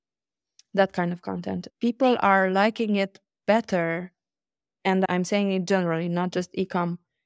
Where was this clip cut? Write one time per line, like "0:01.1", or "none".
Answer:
0:01.7